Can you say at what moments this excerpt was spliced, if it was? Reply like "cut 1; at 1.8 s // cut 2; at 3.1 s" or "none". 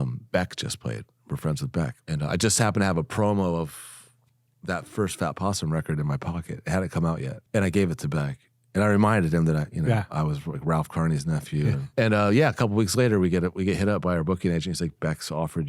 cut 1; at 2.0 s // cut 2; at 7.3 s // cut 3; at 11.8 s